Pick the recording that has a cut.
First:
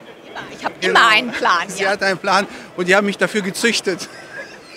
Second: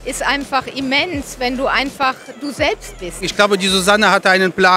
second; 1 cut; at 3.2 s

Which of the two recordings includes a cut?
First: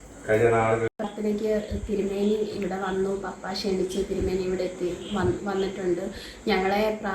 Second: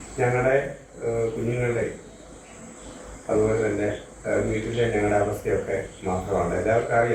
first; 1 cut; at 0.9 s

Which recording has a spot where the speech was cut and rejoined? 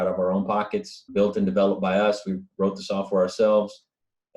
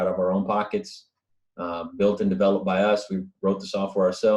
first; 1 cut; at 1.0 s

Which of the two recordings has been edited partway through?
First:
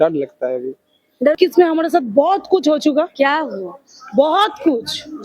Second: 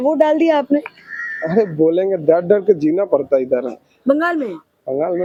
first; 1 cut; at 1.4 s

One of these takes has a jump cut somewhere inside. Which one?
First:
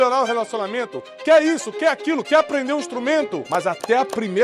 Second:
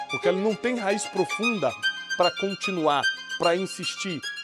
first; 1 cut; at 3.4 s

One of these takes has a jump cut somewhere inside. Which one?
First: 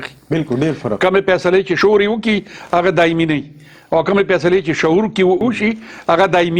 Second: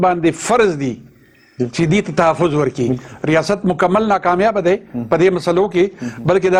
first; 2 cuts; at 1.7 s, 5.4 s

